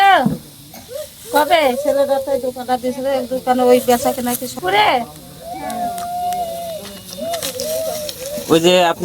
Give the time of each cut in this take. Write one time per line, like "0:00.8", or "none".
0:04.6